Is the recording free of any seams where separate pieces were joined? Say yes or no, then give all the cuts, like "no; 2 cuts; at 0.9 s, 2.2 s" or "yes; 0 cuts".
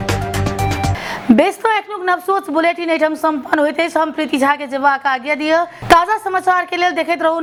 yes; 0 cuts